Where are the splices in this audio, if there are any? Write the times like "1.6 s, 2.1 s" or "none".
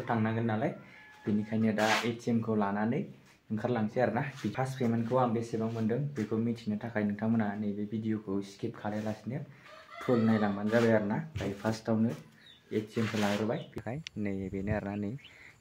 4.5 s, 13.8 s